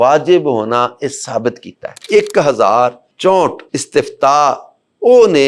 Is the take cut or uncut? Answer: cut